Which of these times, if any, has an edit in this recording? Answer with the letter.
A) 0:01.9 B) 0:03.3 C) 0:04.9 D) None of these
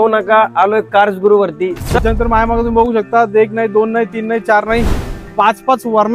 A